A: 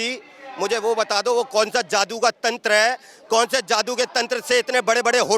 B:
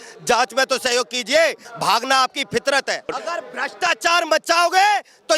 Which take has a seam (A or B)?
B